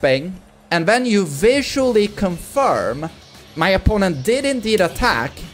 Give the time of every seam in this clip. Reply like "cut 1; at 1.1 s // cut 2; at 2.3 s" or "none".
none